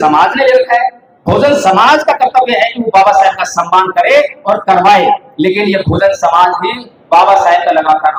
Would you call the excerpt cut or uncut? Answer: uncut